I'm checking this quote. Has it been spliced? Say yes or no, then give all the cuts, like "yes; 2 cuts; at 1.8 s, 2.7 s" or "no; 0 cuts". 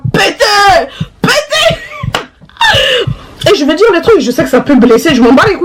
yes; 1 cut; at 3.0 s